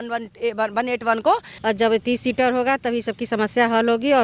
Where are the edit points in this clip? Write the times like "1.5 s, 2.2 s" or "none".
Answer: 1.5 s